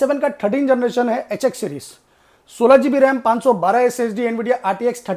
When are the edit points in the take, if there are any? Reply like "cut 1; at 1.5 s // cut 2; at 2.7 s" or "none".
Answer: none